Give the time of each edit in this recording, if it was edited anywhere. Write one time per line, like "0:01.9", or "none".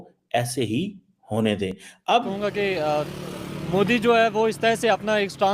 0:02.3